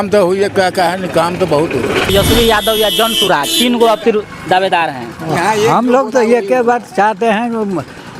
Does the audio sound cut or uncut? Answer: cut